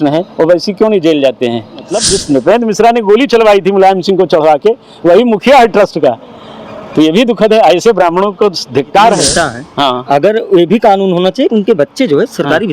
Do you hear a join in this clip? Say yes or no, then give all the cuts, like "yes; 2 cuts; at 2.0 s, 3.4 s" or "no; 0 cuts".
yes; 2 cuts; at 1.9 s, 9.3 s